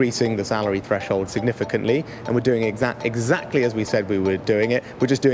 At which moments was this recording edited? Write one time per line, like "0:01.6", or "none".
none